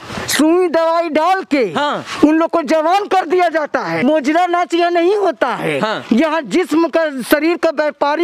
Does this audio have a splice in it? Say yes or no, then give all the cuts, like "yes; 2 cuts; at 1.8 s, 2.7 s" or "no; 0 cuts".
yes; 1 cut; at 4.0 s